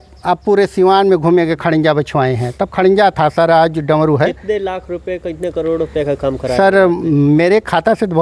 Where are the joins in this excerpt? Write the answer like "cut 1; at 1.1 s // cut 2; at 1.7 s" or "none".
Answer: none